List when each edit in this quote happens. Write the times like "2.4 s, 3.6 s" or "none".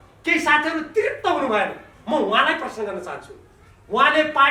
none